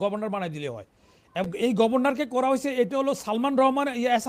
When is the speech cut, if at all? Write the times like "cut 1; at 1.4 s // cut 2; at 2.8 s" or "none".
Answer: cut 1; at 1.5 s

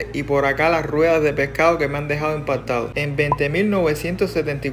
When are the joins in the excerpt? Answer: cut 1; at 3.0 s

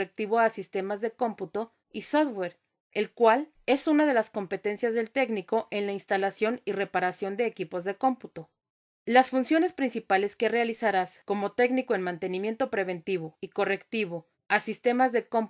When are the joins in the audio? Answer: none

